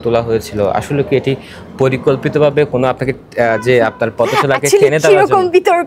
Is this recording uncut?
yes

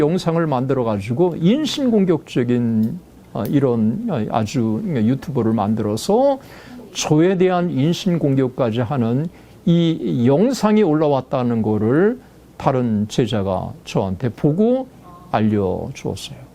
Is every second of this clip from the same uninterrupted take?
yes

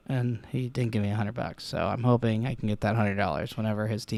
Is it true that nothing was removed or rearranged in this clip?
yes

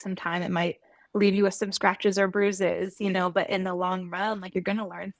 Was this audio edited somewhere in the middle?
no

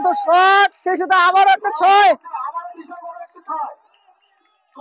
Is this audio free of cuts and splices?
yes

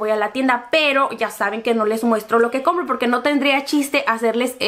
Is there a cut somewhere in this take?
no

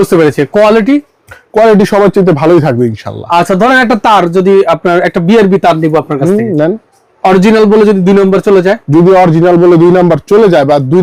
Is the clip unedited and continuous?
yes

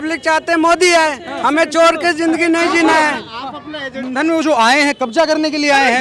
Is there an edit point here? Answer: yes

